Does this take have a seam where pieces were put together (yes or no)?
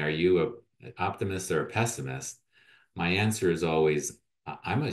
no